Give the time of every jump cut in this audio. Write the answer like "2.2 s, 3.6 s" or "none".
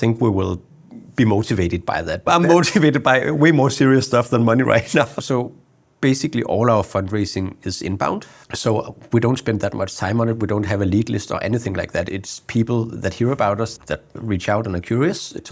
2.2 s, 5.1 s, 8.5 s